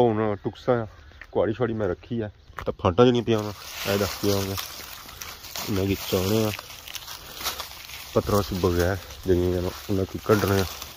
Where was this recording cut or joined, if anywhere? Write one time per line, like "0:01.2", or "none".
0:02.5